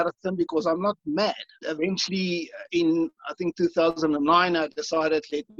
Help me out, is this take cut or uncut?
cut